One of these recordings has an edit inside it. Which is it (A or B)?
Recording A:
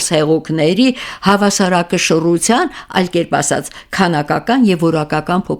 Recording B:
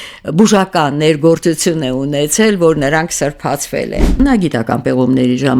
B